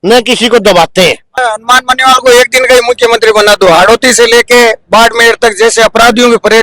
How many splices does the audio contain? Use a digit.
1